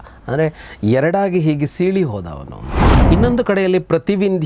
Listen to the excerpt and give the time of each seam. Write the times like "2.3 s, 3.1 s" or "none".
2.9 s